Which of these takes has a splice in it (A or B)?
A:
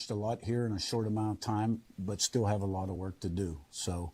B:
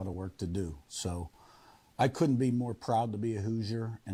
A